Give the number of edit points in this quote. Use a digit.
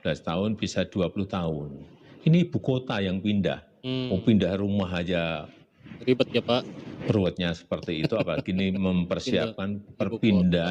0